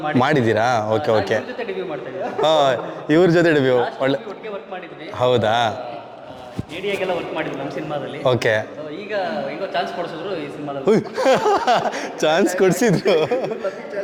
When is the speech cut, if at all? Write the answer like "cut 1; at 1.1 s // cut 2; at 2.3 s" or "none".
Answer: none